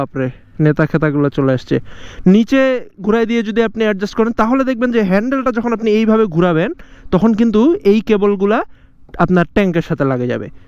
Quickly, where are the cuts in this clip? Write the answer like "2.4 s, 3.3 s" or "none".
none